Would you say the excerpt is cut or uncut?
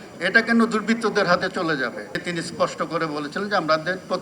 cut